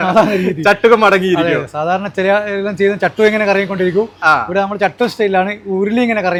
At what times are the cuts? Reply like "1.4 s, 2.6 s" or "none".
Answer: none